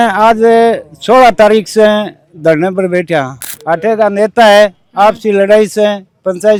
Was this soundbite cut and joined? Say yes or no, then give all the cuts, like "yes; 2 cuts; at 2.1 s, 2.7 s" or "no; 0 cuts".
no; 0 cuts